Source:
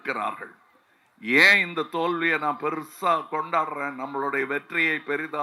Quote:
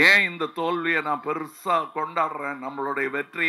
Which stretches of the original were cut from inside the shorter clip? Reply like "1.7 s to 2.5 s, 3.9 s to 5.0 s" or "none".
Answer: none